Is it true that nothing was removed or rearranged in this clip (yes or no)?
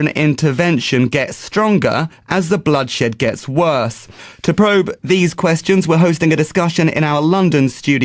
yes